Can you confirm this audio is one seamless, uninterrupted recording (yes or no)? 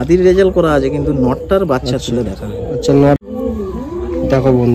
no